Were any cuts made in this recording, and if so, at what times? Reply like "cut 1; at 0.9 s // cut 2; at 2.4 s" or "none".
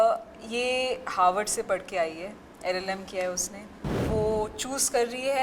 cut 1; at 4.0 s